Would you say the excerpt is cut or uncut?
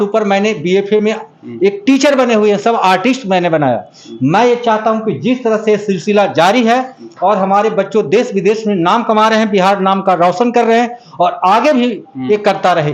uncut